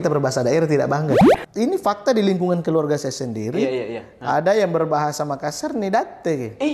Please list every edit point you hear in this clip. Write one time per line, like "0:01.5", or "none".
0:01.4